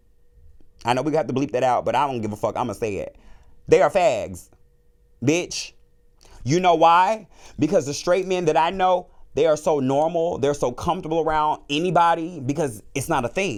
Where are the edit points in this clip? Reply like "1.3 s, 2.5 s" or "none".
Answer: none